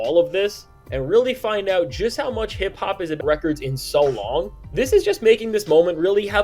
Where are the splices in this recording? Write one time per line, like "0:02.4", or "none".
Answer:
0:03.2